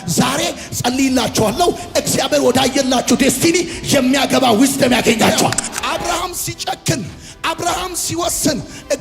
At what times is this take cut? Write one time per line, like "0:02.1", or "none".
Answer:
0:05.7